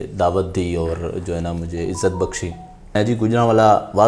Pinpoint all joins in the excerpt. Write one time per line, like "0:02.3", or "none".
0:02.9